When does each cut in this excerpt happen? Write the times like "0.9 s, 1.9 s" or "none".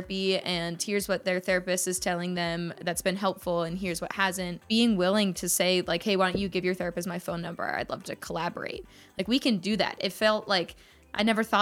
4.6 s